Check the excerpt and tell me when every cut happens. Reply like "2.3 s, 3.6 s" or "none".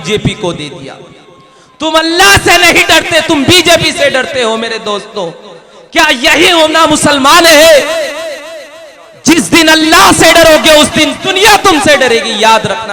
none